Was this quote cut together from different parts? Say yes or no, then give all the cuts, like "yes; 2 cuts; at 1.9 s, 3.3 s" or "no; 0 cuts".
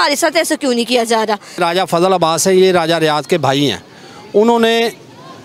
yes; 1 cut; at 1.6 s